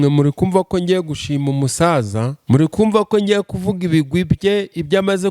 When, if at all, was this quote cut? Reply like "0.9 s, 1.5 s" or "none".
2.3 s